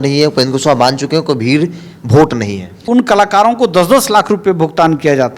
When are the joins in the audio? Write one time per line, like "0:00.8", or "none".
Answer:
0:02.8